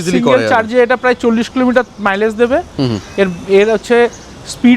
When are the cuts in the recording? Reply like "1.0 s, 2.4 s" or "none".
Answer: none